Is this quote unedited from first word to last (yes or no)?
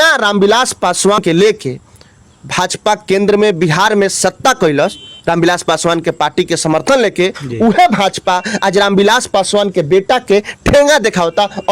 no